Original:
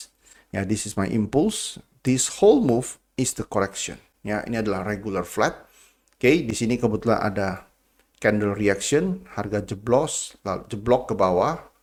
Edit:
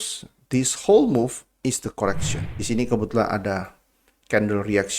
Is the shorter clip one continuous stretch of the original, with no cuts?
no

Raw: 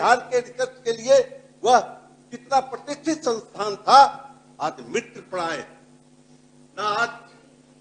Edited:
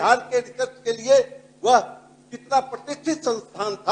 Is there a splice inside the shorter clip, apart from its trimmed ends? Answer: no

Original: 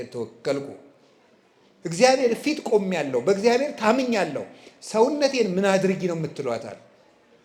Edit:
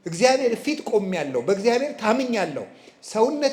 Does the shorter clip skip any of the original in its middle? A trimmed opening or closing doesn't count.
no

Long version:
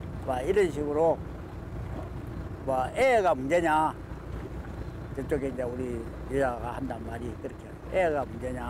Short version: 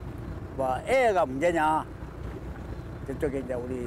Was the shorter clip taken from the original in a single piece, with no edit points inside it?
yes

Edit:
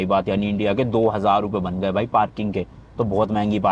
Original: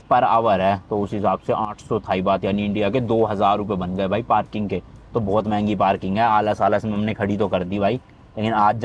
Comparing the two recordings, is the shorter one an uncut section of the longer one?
yes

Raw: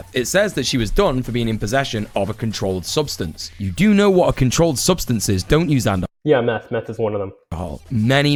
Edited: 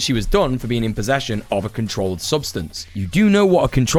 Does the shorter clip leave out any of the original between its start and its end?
no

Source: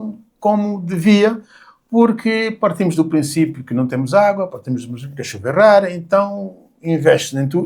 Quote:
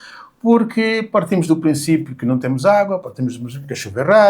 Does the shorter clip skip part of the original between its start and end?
no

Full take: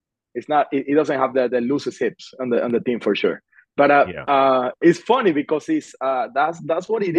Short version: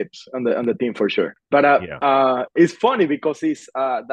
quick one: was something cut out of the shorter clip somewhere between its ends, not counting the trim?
yes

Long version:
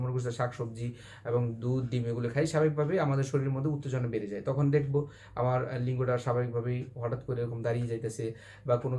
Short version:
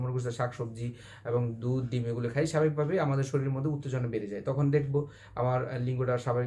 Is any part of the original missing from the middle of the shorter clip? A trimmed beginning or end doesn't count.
no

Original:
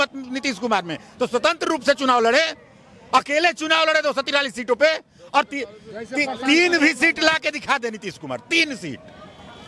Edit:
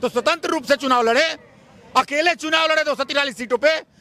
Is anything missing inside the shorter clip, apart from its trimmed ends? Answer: no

